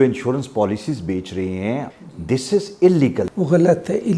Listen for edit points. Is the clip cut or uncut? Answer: cut